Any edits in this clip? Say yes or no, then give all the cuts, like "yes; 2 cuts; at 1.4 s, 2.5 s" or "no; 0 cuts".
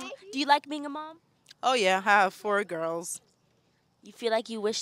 no; 0 cuts